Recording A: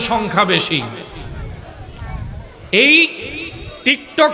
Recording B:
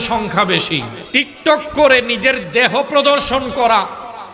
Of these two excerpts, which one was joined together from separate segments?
B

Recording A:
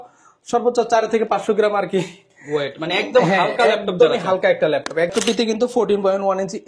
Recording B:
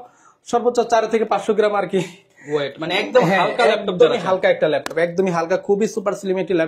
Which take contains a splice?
A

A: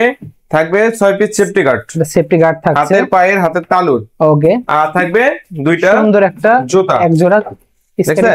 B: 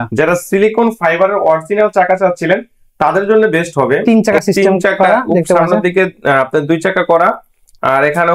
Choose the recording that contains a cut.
B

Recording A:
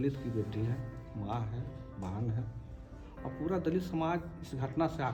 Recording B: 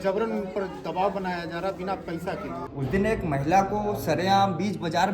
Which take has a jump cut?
B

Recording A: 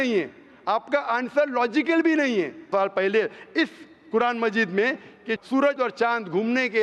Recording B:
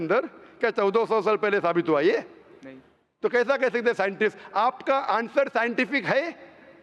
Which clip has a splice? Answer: A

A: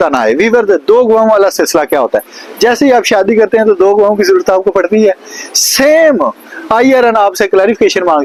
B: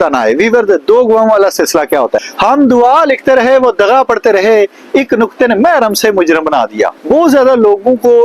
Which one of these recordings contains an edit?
B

